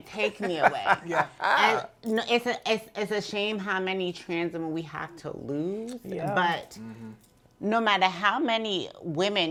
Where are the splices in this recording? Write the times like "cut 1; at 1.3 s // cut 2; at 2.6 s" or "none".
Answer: none